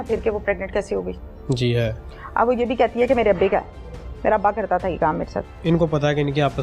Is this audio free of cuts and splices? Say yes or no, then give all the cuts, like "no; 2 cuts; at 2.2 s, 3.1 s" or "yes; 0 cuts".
no; 1 cut; at 5.6 s